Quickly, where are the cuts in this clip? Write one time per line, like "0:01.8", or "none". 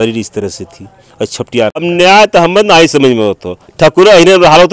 0:01.8